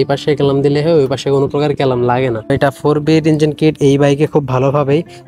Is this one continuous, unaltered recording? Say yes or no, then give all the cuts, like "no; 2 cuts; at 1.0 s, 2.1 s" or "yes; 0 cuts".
no; 1 cut; at 2.5 s